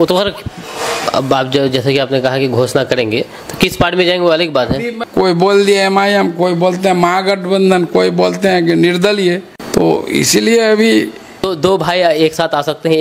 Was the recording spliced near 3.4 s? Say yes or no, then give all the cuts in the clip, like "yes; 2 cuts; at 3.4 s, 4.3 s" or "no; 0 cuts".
no; 3 cuts; at 4.9 s, 9.5 s, 11.5 s